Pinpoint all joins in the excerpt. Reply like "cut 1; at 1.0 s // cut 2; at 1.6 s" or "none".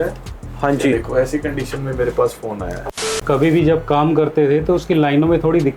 cut 1; at 3.2 s